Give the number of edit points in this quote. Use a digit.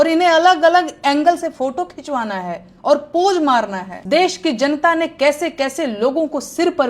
1